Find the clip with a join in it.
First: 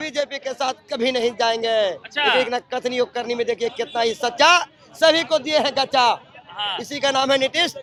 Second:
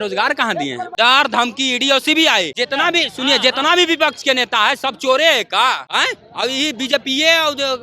second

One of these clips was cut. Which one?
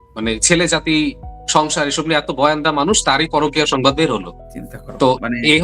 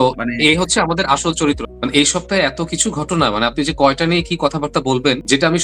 second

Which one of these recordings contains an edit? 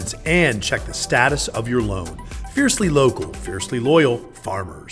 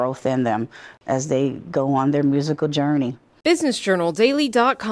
second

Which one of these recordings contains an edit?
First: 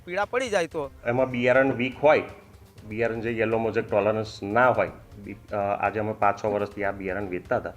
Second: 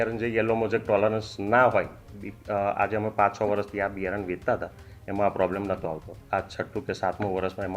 first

